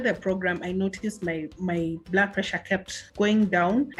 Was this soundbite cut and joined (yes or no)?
yes